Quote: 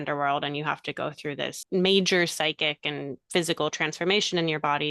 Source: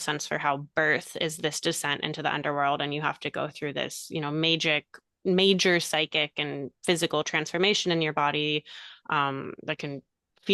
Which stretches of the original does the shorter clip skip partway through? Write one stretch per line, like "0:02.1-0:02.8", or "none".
0:03.9-0:05.1